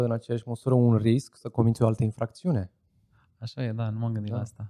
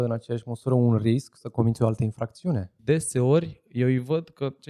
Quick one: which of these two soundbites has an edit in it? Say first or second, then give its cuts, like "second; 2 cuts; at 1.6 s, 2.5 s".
second; 1 cut; at 2.7 s